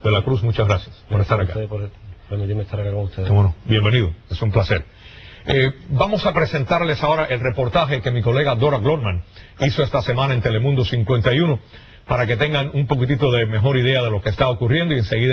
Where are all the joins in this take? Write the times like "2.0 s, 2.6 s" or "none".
none